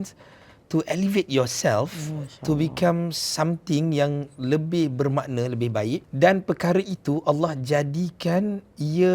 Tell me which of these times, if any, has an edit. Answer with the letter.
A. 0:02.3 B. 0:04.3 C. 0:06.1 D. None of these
C